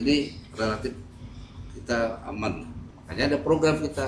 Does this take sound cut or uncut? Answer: cut